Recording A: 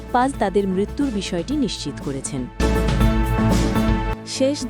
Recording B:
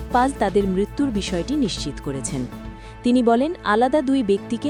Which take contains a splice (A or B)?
A